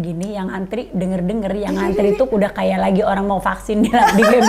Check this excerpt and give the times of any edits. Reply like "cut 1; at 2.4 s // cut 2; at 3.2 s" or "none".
none